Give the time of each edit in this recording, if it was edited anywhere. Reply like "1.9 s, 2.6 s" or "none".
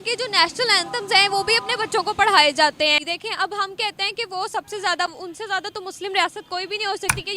3.0 s